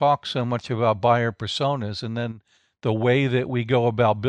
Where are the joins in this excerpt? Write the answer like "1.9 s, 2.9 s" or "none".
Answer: none

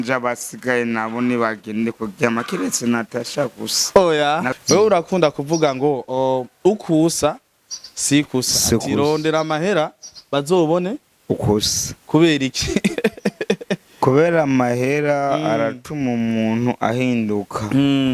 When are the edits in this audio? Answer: 4.5 s

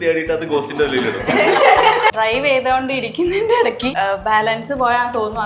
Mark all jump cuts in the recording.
2.1 s, 3.9 s

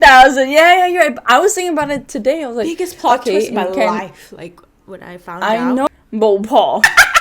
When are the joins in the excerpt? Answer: 5.9 s

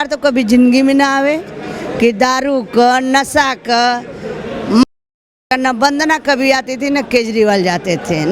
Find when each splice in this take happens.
none

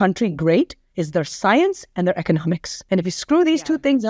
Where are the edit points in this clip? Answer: 2.7 s

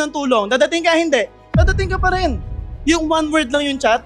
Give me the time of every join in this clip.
2.7 s

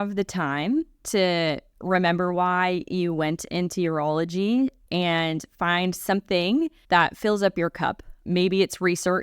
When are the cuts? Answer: 1.7 s, 4.8 s, 6.8 s

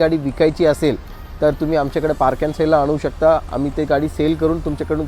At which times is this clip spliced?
none

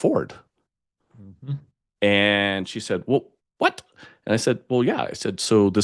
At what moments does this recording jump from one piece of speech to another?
none

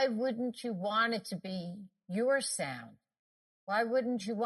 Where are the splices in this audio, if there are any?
none

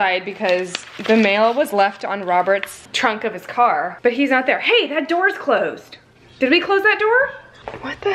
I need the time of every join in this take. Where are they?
none

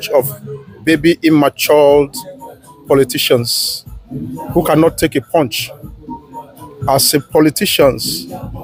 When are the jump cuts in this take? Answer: none

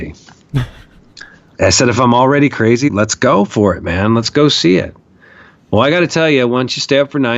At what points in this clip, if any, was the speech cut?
1.5 s, 2.9 s

